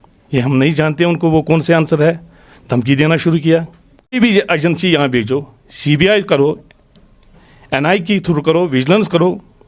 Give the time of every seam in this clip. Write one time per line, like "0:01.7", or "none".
0:04.1

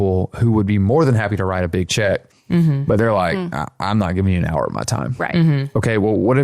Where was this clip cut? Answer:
none

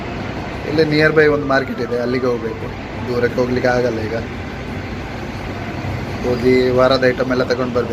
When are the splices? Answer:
none

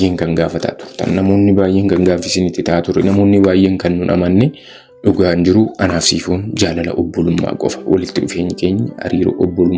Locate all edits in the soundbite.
none

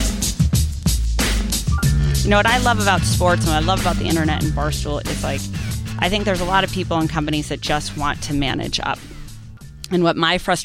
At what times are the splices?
0:01.9

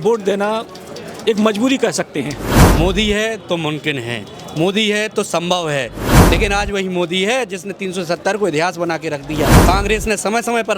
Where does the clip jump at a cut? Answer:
0:02.6
0:06.1
0:09.6

